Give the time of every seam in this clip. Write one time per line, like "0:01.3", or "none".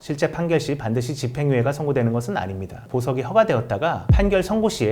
0:02.8

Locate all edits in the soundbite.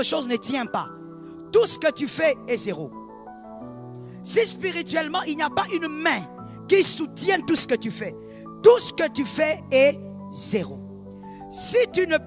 none

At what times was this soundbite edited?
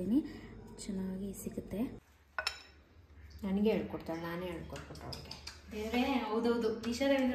0:02.1

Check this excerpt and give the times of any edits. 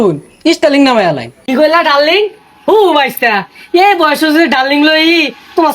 0:01.3

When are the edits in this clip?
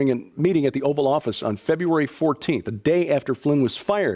0:02.5

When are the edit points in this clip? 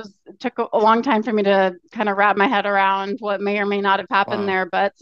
none

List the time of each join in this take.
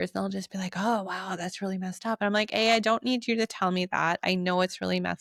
none

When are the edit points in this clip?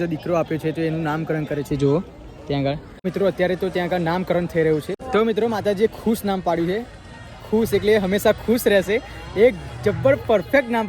0:02.9
0:04.9

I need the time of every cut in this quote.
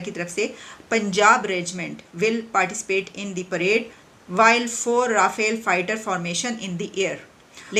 none

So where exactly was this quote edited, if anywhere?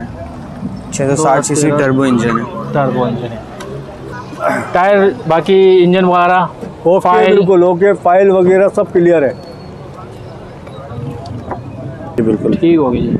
0:03.6
0:12.2

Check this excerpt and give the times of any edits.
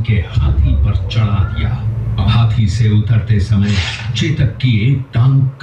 0:02.2

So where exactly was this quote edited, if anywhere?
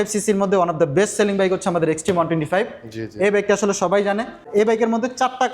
0:04.5

